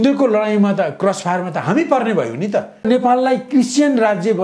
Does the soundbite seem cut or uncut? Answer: cut